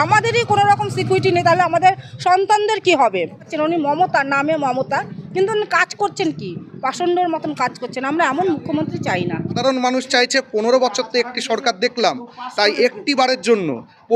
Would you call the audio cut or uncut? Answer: cut